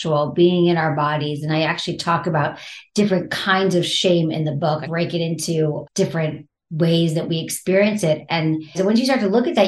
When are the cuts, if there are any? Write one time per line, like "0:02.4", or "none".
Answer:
0:04.9
0:06.2
0:08.7